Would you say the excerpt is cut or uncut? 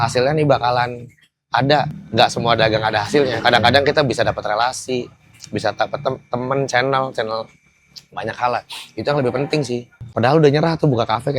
cut